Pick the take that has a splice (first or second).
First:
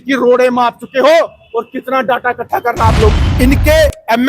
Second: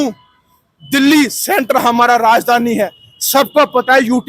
first